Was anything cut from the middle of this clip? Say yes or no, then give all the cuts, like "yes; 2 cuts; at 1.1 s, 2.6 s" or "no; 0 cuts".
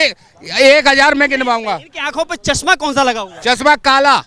no; 0 cuts